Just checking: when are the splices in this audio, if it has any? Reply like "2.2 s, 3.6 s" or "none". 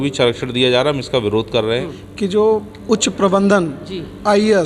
1.8 s